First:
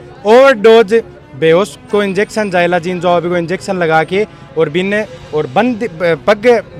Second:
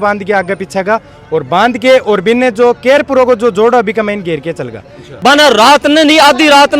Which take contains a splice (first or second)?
second